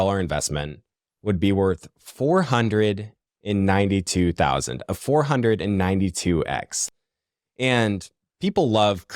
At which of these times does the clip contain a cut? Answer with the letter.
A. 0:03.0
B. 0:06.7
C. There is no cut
B